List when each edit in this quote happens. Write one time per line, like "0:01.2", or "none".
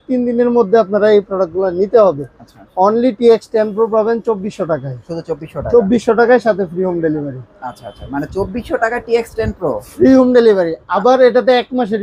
none